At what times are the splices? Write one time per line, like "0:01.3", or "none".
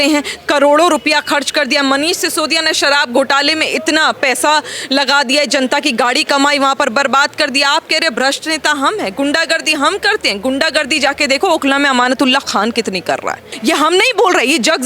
0:13.4